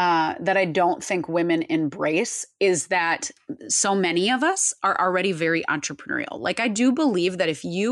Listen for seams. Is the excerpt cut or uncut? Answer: uncut